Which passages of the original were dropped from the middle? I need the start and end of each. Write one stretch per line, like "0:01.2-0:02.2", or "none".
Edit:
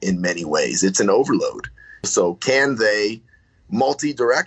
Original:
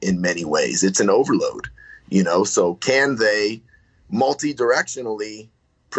0:02.1-0:02.5